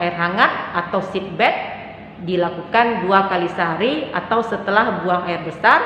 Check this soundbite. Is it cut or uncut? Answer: uncut